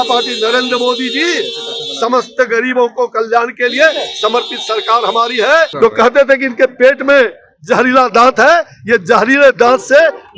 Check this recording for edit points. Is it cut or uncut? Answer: cut